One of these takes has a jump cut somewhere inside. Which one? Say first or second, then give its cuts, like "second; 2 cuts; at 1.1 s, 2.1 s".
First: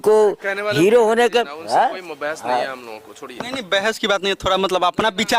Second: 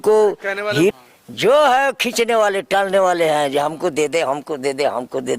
second; 1 cut; at 0.9 s